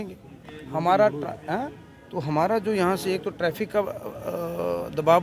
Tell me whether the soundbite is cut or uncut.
uncut